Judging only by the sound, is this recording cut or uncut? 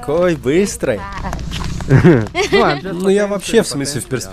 uncut